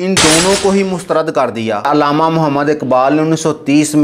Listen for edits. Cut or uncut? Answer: cut